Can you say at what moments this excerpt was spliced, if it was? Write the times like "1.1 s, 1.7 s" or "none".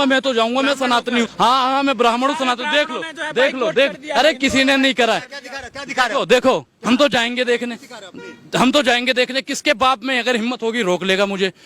1.3 s

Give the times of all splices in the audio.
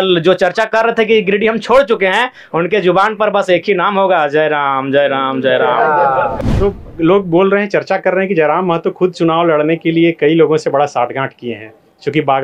6.4 s

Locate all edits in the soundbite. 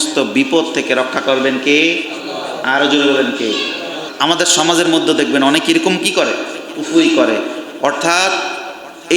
4.0 s

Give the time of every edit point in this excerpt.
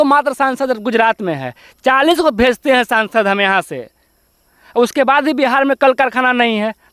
none

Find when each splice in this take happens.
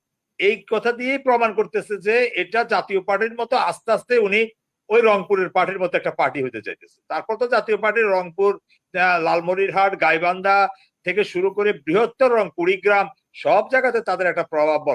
none

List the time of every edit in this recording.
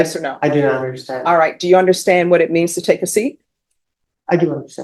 none

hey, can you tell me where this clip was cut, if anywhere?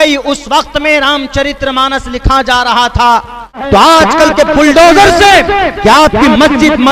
3.6 s

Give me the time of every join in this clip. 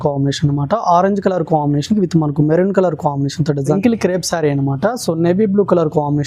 3.8 s

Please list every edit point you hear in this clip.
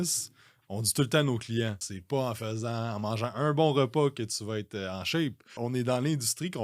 1.9 s, 5.6 s

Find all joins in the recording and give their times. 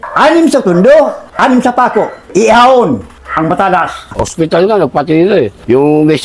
2.3 s, 3.2 s, 4.0 s

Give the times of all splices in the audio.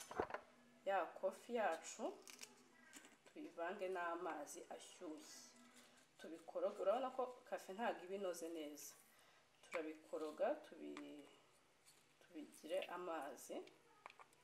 none

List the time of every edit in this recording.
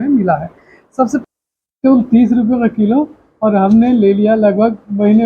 1.2 s

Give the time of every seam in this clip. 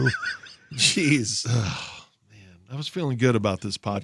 1.4 s

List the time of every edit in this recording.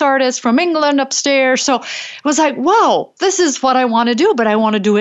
none

